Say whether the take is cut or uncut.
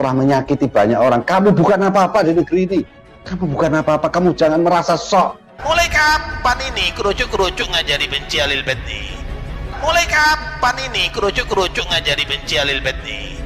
uncut